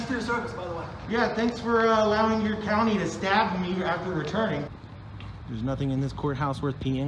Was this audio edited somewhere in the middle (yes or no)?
yes